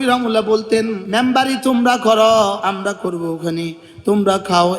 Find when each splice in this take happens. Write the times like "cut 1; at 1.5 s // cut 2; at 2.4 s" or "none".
cut 1; at 1.0 s // cut 2; at 2.6 s